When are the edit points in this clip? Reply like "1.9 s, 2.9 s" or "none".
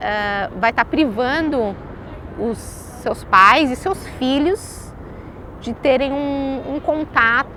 none